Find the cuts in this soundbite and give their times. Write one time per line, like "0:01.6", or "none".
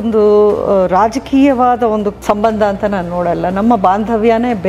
0:02.2